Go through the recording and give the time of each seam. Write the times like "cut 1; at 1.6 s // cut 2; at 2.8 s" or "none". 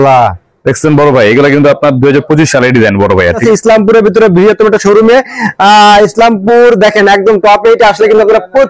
cut 1; at 3.4 s